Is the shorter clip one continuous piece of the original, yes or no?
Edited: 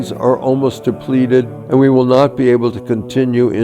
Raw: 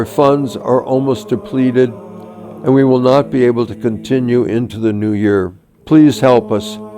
no